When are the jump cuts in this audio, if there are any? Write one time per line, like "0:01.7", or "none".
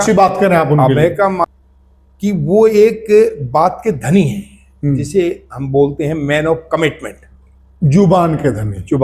0:01.5